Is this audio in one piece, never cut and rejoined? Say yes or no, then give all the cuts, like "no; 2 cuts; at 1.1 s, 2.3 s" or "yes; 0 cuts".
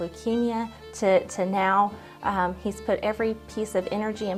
yes; 0 cuts